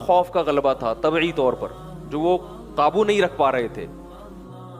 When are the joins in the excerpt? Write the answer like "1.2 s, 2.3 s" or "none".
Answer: 3.9 s